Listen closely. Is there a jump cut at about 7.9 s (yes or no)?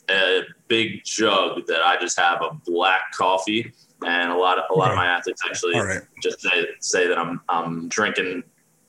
yes